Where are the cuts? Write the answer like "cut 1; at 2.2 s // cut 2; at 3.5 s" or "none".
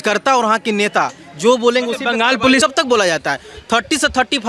cut 1; at 2.6 s